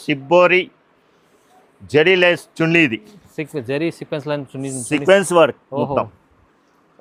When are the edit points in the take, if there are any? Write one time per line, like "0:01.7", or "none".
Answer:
none